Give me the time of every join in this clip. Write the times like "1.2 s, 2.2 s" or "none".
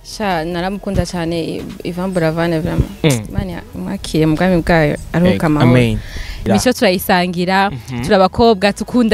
6.4 s